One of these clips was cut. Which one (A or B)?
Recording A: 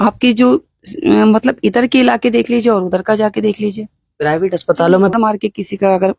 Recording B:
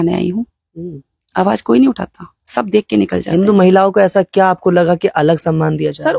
A